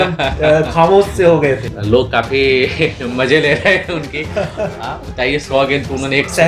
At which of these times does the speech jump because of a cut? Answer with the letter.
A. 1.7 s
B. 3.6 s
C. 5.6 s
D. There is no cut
A